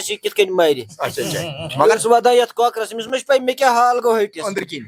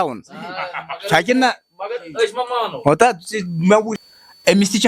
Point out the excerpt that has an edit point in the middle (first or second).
second